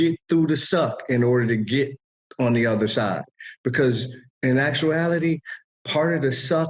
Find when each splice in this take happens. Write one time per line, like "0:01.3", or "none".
none